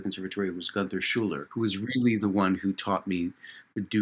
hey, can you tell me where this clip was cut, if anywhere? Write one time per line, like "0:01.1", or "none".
0:01.4